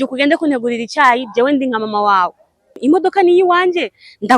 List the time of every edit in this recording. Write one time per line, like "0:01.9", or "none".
0:02.8